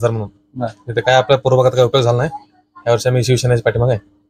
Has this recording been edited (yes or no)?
no